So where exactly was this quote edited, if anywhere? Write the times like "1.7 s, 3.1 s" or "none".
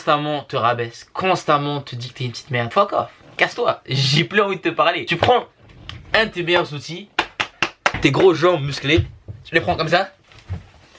2.7 s, 5.2 s